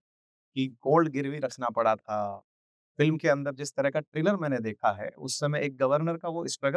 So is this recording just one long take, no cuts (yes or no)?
yes